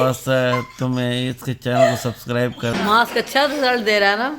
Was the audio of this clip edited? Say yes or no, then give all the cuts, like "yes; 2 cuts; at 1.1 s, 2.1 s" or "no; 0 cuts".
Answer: yes; 1 cut; at 2.8 s